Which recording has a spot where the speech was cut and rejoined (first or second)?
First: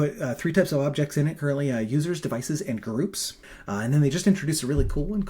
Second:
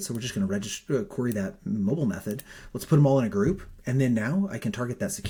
first